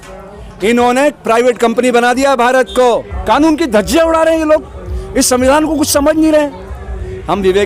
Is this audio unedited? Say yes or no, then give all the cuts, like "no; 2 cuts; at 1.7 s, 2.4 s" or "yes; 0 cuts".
yes; 0 cuts